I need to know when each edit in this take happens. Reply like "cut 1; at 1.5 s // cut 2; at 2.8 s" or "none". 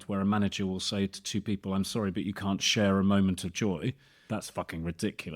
cut 1; at 4.1 s